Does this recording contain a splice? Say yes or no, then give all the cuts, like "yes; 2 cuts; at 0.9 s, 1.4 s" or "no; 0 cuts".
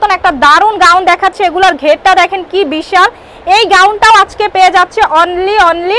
no; 0 cuts